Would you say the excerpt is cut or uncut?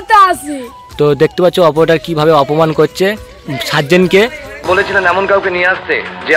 cut